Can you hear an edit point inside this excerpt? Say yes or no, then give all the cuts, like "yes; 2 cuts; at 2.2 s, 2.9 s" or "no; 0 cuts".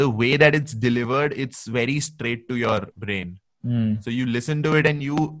yes; 1 cut; at 2.9 s